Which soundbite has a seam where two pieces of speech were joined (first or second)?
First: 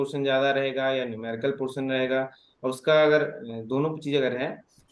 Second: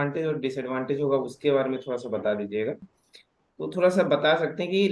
second